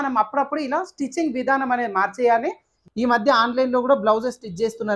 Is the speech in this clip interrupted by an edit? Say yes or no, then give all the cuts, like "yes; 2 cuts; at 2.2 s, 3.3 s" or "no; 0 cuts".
yes; 1 cut; at 2.7 s